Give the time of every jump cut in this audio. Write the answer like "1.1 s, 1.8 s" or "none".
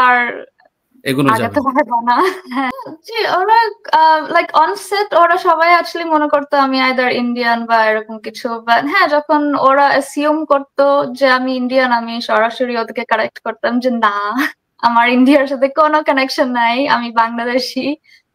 2.7 s